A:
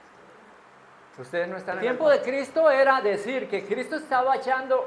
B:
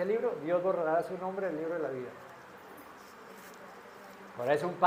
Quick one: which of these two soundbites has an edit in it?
A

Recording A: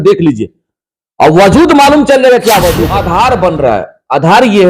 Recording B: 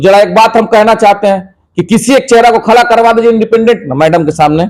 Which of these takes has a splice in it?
A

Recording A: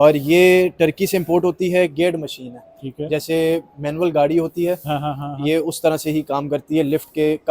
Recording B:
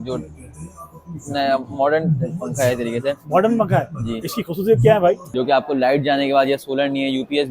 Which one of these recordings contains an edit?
B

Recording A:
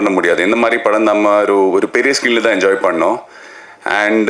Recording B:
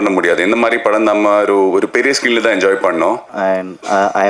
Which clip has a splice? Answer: B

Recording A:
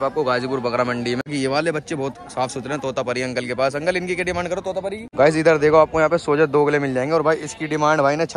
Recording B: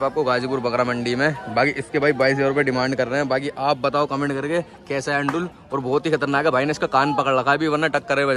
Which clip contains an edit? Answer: A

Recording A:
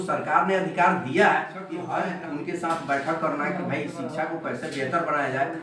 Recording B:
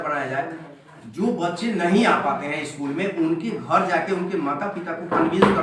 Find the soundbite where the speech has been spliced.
A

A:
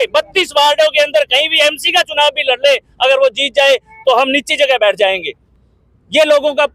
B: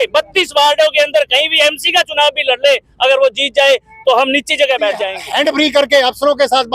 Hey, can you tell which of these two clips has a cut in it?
B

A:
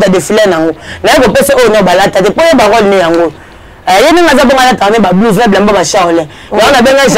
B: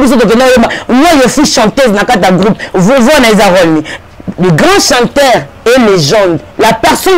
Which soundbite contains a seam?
B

